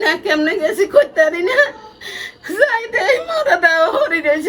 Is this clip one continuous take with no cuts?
yes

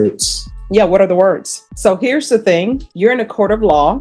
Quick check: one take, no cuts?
no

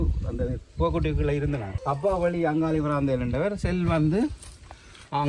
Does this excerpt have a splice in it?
yes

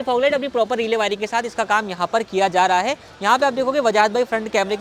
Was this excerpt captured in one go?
yes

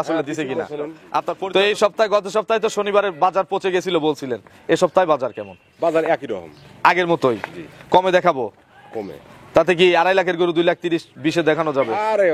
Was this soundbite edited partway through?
yes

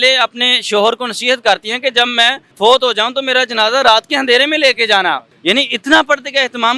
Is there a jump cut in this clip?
yes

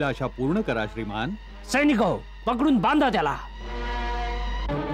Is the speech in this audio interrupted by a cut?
no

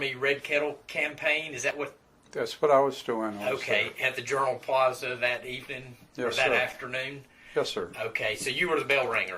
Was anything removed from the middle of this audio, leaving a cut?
no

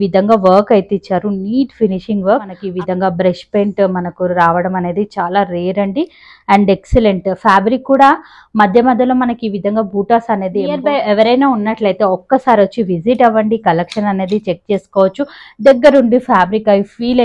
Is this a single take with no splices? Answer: no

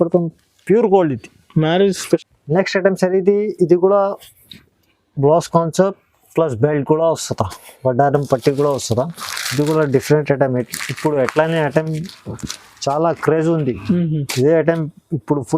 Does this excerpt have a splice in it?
yes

